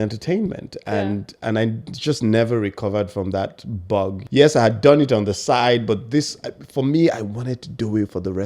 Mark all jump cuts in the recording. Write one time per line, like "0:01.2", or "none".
0:04.2

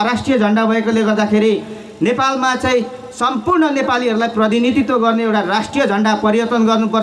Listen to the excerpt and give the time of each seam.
none

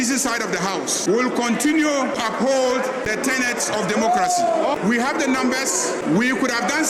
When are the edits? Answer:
0:01.0
0:02.2
0:03.1
0:04.6
0:06.0

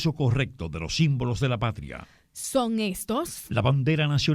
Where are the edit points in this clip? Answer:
none

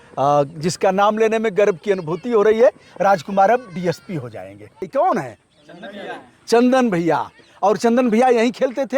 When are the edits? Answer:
0:04.9

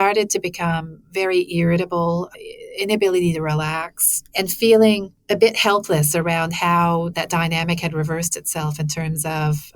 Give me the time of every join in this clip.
0:05.1

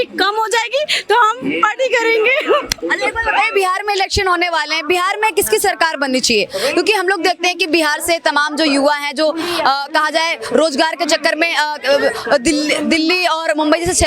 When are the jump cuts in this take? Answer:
none

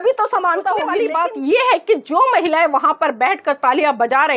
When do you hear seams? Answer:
0:00.9

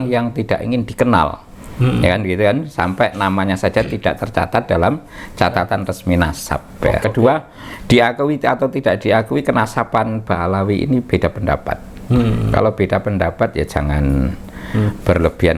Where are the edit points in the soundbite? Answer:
0:07.0

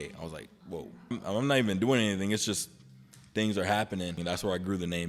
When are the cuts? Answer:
0:01.2
0:04.2

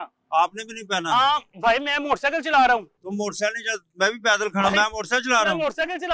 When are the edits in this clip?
none

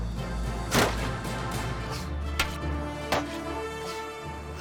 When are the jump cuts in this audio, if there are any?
none

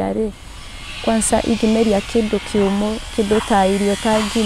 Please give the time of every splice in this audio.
none

